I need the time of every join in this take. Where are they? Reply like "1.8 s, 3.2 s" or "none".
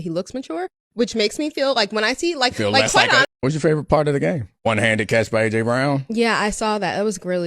3.2 s